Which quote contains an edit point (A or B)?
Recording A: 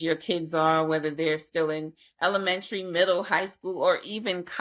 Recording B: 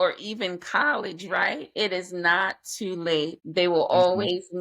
B